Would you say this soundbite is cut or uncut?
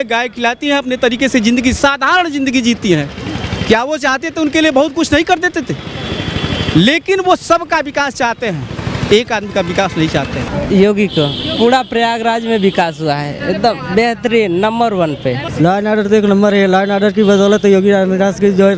cut